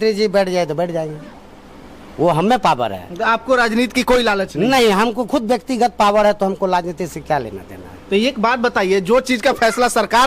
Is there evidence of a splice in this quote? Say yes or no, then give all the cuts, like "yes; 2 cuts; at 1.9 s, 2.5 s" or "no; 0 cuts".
no; 0 cuts